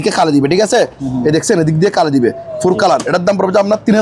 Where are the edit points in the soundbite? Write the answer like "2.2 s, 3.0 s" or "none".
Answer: 3.0 s